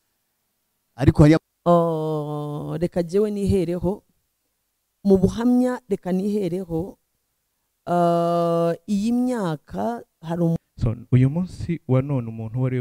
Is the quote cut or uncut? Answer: cut